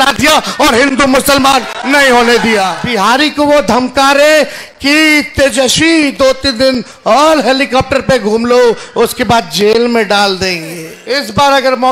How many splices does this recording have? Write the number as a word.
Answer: two